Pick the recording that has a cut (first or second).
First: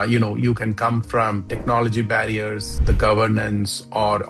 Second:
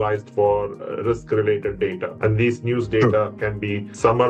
second